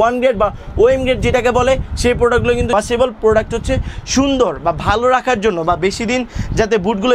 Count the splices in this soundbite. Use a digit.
1